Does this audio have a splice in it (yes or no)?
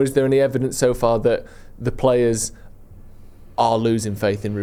no